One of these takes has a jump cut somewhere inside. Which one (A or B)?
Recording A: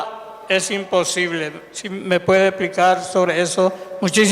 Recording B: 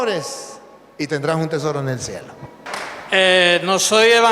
B